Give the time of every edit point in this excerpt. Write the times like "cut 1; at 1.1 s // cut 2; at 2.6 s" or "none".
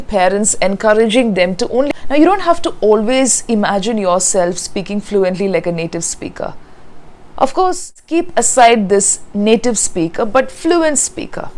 cut 1; at 1.9 s // cut 2; at 8.0 s